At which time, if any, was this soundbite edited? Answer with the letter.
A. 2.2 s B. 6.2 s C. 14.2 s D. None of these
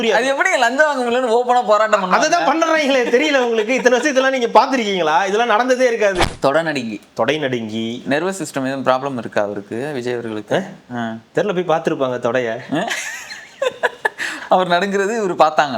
B